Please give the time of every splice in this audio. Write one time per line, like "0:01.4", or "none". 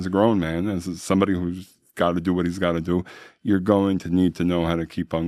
none